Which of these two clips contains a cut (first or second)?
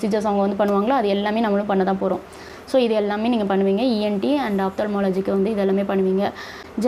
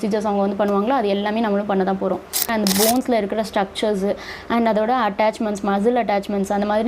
second